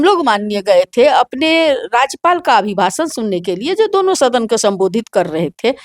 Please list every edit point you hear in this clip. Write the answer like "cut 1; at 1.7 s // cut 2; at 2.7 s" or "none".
none